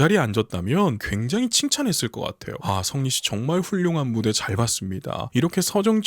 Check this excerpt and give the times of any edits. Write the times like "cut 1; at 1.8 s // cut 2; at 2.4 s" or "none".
cut 1; at 1.1 s // cut 2; at 2.5 s // cut 3; at 5.2 s